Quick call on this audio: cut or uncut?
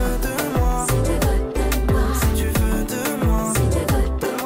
uncut